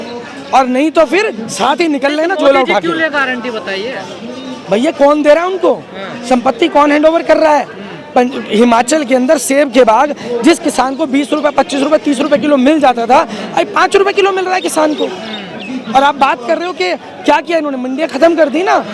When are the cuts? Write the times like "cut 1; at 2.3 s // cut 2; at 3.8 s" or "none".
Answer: none